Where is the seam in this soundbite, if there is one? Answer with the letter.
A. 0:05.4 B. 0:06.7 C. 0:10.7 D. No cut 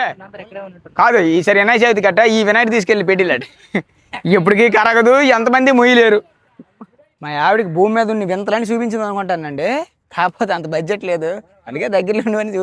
B